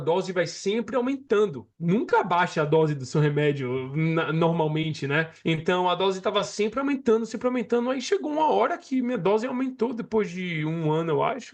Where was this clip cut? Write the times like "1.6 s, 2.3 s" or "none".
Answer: 5.3 s